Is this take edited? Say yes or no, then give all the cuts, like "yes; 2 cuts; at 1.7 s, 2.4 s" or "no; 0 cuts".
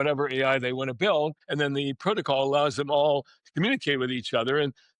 yes; 1 cut; at 1.4 s